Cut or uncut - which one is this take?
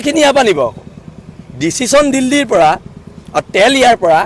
uncut